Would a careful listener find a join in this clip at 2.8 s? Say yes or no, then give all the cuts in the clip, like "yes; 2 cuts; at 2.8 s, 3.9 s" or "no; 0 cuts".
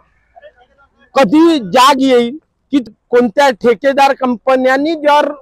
yes; 1 cut; at 2.8 s